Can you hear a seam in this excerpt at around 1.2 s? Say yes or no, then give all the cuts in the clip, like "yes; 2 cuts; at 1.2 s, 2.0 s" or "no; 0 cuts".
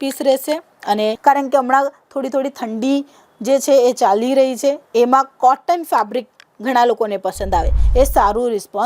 yes; 2 cuts; at 1.2 s, 7.8 s